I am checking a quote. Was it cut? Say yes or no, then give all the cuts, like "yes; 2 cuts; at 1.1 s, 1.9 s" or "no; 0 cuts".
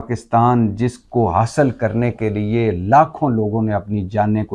no; 0 cuts